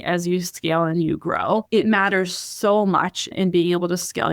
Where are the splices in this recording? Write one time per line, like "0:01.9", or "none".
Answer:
0:01.7
0:03.3